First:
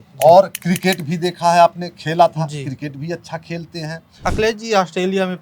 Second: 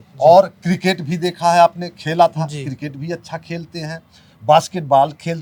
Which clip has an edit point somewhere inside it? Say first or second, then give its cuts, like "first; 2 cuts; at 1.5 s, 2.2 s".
first; 1 cut; at 4.1 s